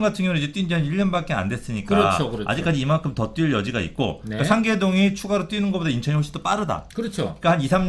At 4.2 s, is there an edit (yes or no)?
no